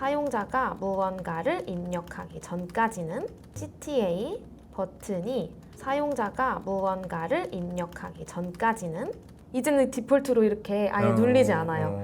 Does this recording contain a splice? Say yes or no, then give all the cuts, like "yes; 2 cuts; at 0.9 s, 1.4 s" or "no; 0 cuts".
yes; 3 cuts; at 3.5 s, 5.7 s, 9.3 s